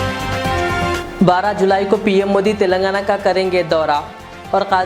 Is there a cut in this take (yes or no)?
no